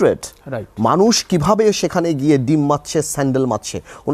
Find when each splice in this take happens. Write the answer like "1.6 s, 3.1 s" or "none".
none